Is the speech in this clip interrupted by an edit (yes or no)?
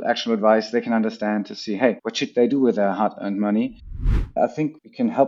yes